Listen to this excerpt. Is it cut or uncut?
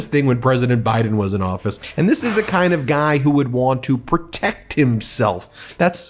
uncut